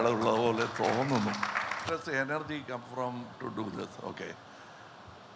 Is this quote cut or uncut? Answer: cut